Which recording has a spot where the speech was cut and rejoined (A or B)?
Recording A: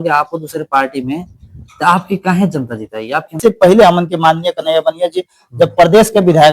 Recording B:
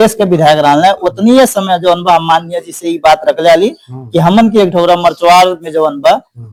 A